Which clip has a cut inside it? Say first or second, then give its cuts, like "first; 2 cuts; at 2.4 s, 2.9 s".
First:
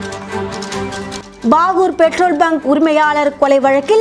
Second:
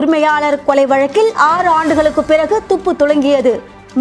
first; 1 cut; at 1.1 s